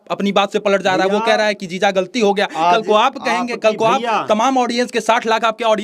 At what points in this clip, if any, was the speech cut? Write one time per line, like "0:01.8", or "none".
none